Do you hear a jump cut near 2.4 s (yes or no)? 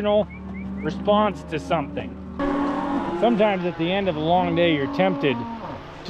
yes